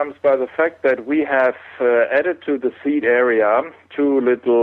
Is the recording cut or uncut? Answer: uncut